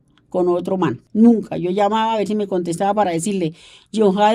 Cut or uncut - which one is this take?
cut